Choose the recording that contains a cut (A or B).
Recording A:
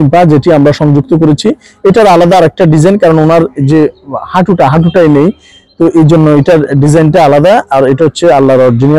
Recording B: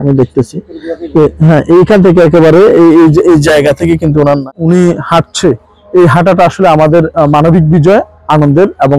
B